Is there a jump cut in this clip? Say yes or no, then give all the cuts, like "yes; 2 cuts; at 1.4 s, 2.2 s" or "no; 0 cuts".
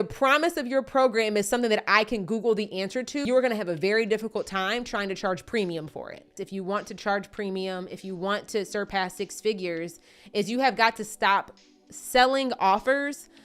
yes; 2 cuts; at 3.2 s, 6.4 s